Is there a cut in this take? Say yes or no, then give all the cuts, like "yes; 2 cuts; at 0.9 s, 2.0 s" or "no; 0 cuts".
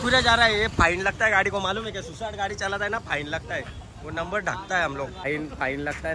yes; 1 cut; at 5.2 s